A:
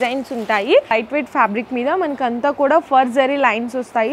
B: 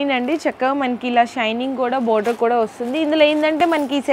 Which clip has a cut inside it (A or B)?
A